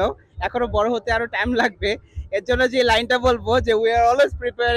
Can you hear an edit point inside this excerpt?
no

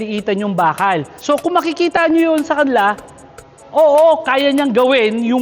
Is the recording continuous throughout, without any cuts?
no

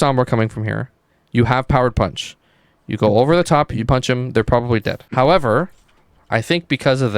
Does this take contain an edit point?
yes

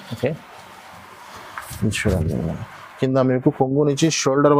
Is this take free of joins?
yes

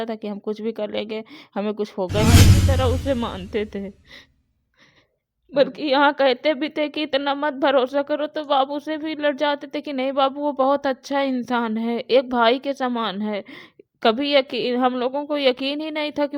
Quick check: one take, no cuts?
no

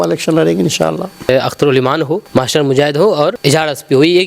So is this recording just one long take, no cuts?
no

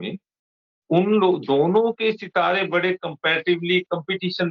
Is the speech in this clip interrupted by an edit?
no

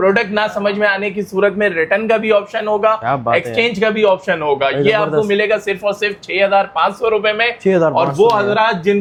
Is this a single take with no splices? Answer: yes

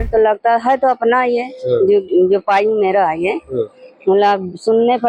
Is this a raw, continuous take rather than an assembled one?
yes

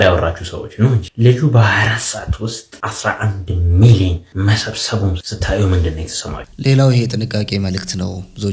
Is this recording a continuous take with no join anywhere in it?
no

